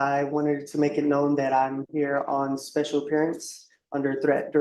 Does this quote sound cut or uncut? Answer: uncut